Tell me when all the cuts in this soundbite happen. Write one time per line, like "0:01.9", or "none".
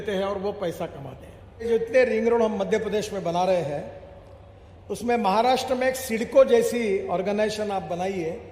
0:01.7